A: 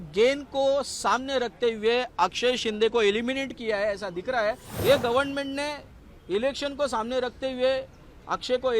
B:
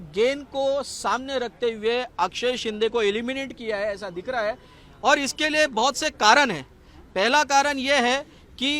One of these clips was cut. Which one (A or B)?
A